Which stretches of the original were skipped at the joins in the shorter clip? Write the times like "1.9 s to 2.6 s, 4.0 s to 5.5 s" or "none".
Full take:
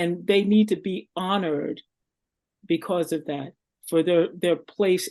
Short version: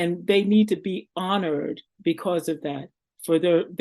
1.9 s to 2.5 s